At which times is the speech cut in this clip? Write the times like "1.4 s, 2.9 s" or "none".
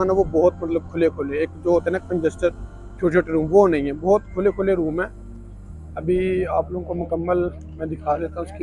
none